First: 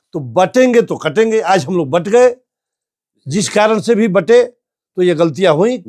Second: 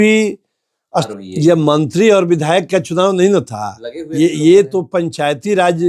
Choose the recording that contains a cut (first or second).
second